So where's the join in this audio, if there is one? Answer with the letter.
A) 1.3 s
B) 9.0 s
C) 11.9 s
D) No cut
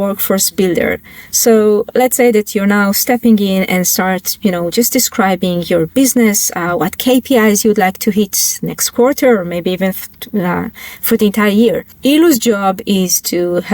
C